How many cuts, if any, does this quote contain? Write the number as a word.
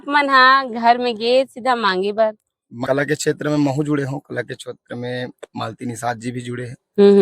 one